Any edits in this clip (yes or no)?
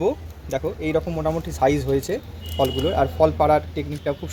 no